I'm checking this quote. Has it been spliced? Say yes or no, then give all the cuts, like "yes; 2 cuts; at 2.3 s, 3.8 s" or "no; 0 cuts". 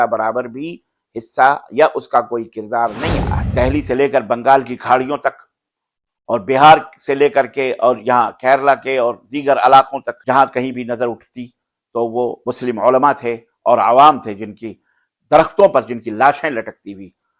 yes; 3 cuts; at 3.4 s, 10.1 s, 12.4 s